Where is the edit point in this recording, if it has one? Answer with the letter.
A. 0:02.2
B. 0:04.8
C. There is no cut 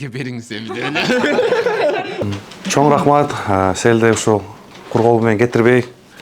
A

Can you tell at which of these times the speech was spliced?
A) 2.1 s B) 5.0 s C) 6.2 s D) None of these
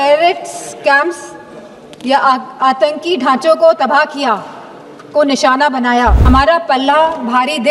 C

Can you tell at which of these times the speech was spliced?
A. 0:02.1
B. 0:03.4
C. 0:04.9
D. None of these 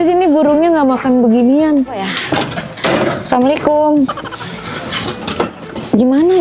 A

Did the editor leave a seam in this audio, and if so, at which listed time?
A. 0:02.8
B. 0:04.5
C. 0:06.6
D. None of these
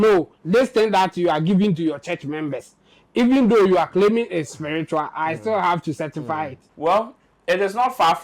C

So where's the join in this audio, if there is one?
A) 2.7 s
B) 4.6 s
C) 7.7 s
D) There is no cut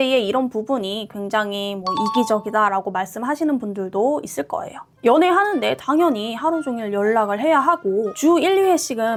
D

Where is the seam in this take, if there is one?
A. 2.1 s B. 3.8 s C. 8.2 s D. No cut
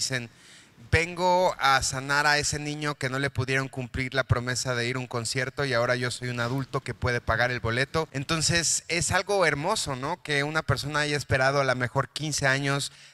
C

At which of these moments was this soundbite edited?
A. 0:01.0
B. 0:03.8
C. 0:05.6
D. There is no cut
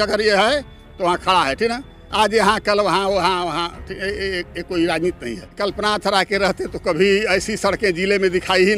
C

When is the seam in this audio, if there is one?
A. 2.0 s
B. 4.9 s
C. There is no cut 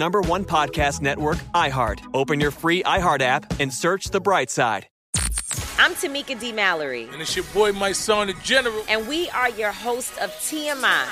B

